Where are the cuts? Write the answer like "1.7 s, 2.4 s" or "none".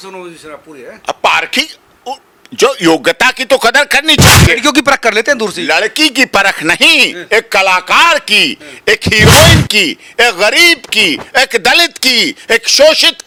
none